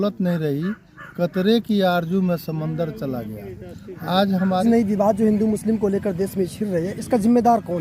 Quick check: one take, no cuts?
no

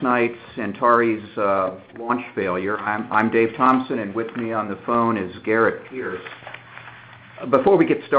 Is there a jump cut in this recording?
yes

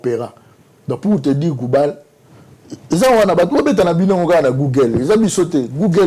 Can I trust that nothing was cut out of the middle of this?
yes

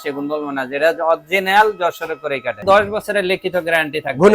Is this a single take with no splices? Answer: no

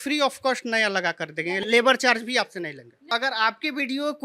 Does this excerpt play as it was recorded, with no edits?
no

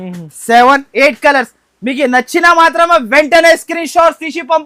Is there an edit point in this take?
no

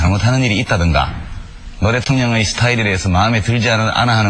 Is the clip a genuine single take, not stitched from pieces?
yes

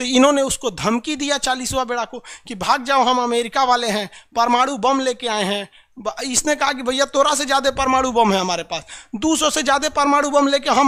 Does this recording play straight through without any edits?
yes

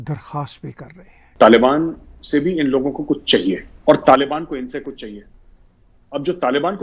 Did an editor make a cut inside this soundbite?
yes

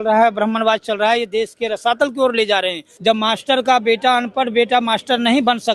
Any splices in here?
yes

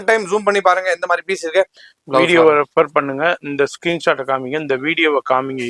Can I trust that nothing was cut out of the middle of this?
no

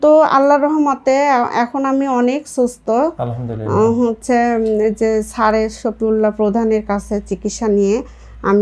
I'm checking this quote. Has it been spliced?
no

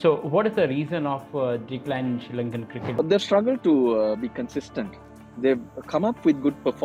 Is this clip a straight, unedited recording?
yes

